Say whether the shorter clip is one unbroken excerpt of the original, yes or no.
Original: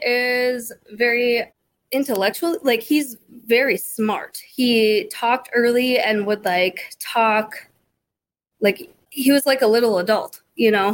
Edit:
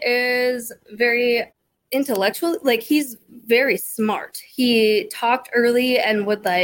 yes